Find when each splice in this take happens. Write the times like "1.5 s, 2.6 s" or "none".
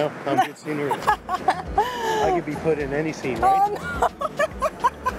1.5 s